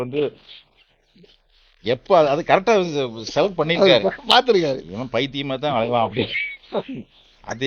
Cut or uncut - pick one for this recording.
uncut